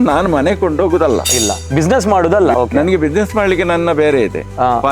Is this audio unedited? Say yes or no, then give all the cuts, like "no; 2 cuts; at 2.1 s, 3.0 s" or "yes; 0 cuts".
no; 1 cut; at 2.5 s